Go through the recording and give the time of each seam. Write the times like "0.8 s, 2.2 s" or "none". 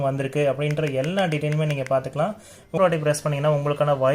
2.8 s